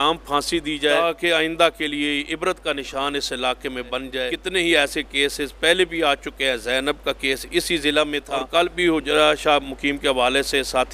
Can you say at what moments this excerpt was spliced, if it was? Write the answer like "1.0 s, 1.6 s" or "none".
1.0 s, 4.3 s, 8.3 s